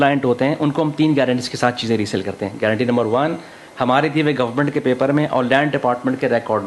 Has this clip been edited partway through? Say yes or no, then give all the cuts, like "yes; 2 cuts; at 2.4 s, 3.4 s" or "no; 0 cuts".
no; 0 cuts